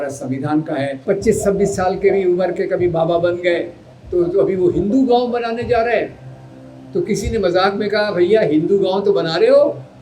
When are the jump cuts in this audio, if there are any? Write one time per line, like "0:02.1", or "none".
0:01.0